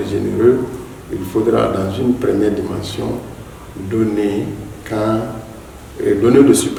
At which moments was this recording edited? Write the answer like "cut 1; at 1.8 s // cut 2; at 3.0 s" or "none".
none